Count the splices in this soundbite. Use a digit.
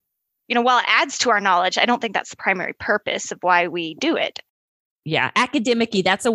0